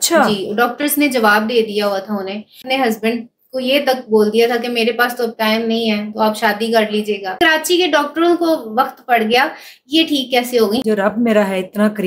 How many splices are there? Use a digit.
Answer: 3